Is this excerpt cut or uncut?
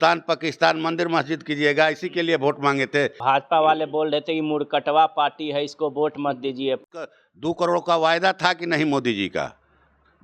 cut